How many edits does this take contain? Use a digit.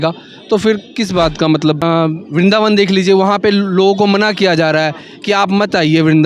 1